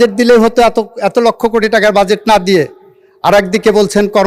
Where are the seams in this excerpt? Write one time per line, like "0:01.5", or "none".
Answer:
none

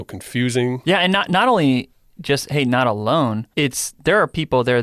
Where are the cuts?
0:00.8
0:03.4

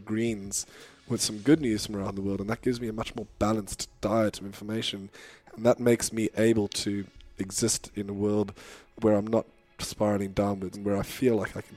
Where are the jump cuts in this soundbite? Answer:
0:08.9
0:10.7

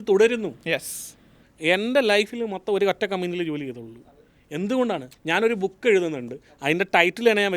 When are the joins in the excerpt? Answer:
0:05.1

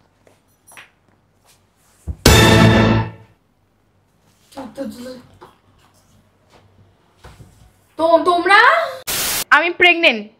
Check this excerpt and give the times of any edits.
0:09.4

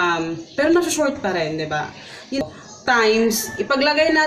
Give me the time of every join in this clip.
0:02.4

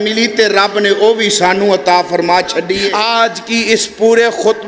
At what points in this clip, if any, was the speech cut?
0:02.8

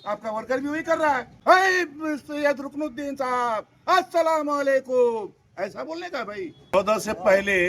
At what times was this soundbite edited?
0:01.3
0:06.7

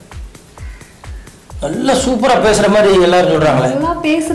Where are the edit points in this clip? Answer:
none

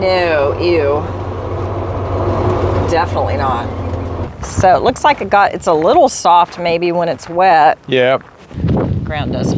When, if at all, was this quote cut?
0:04.4
0:08.7

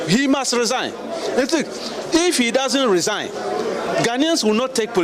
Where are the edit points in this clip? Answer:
none

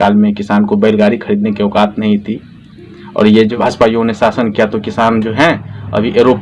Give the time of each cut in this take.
0:03.5

